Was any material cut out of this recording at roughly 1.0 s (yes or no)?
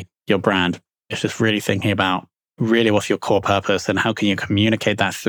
yes